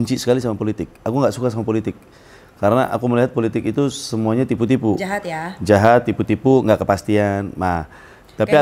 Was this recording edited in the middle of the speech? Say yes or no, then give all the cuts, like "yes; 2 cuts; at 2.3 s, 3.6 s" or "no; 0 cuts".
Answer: no; 0 cuts